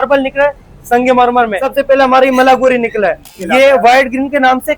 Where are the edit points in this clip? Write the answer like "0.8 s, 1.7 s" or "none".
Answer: 1.6 s, 3.3 s